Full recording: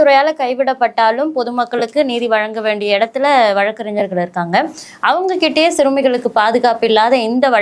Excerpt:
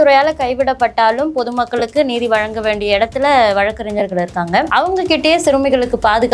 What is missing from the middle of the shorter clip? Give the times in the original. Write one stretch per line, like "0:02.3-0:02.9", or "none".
0:04.7-0:05.0